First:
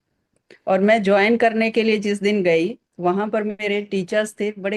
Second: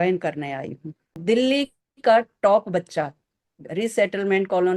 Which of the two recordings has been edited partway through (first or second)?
second